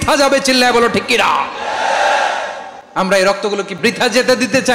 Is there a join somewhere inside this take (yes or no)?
no